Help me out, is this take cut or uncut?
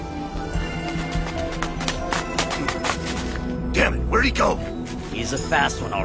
uncut